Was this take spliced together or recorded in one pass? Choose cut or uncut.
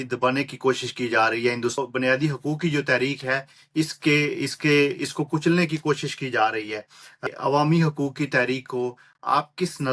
cut